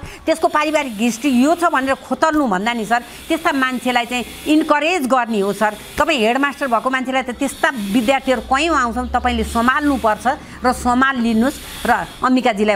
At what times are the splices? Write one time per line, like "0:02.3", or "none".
none